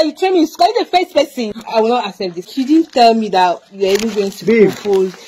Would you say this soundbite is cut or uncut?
cut